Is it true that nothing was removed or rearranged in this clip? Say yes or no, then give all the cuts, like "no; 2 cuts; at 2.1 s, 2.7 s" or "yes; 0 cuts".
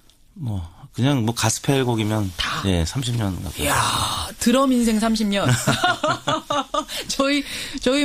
no; 1 cut; at 1.4 s